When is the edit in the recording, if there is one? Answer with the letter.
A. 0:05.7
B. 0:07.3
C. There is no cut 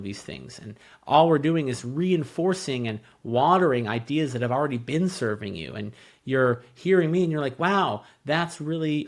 C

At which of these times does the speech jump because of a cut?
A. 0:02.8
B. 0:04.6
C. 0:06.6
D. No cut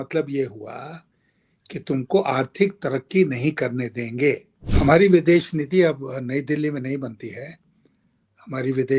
B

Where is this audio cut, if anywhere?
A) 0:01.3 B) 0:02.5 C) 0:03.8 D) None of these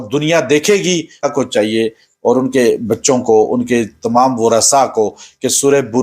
A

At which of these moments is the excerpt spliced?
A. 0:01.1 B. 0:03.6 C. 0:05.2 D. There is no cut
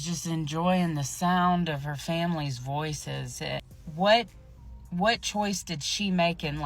B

